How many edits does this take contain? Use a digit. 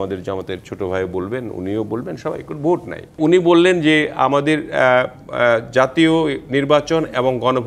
1